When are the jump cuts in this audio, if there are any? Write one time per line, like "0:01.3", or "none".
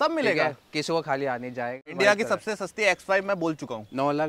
0:01.9